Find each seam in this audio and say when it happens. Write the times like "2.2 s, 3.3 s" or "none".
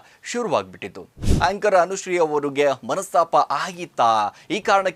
1.3 s

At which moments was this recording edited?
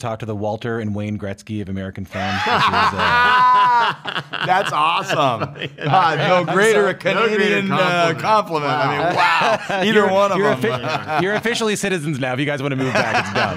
none

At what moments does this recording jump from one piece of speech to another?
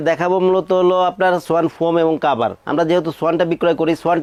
none

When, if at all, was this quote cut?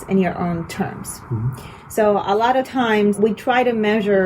3.2 s

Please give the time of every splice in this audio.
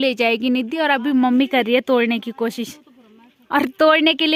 none

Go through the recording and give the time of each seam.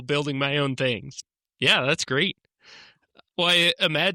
none

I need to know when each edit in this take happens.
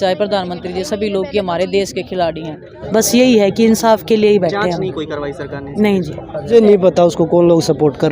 2.7 s, 6.5 s

